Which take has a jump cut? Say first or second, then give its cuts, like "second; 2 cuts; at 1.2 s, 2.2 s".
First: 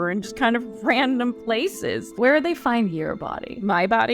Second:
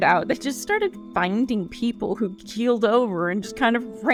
first; 1 cut; at 2.1 s